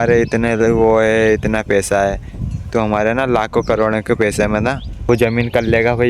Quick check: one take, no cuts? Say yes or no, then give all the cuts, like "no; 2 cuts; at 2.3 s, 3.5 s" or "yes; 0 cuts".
no; 1 cut; at 5.1 s